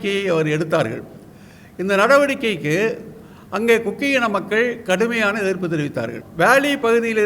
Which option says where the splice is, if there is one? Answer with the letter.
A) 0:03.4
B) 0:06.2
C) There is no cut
B